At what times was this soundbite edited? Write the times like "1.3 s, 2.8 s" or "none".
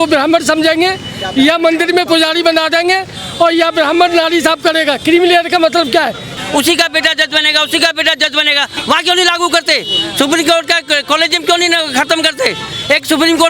6.3 s